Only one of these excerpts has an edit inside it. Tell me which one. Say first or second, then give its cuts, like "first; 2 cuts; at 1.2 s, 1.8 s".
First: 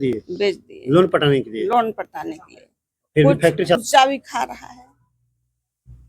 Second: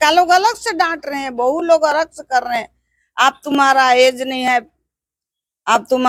first; 1 cut; at 3.8 s